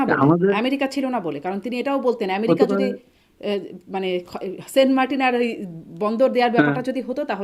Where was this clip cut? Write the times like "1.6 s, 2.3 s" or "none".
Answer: none